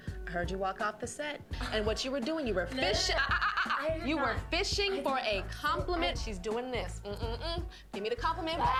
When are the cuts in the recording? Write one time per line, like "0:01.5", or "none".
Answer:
none